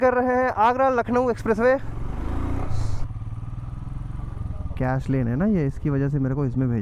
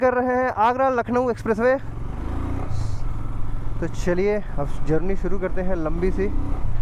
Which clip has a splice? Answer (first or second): first